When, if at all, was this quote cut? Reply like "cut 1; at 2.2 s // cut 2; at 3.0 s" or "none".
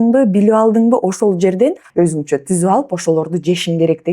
cut 1; at 1.8 s

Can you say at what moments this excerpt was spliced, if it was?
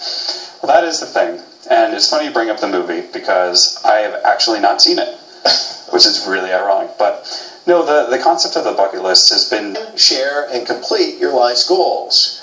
none

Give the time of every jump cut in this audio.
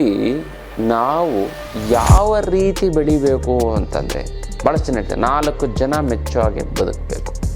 none

